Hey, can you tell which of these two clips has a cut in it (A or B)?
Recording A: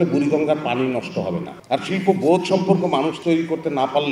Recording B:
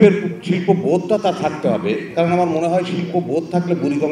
A